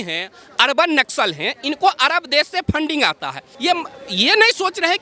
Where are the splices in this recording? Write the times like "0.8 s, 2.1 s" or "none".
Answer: 3.4 s